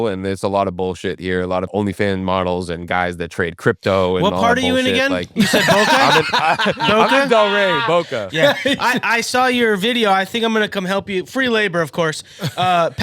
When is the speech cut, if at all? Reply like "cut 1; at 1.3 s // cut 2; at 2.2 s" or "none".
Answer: cut 1; at 1.7 s